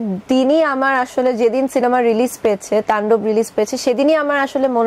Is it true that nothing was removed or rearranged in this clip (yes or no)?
yes